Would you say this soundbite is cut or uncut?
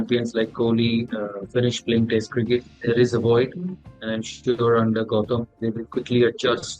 cut